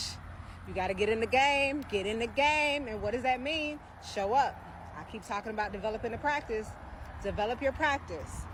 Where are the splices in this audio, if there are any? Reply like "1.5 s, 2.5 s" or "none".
none